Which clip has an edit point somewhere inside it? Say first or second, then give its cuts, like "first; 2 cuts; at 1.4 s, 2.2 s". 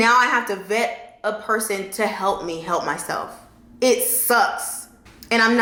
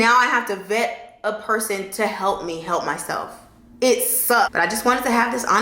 second; 1 cut; at 4.5 s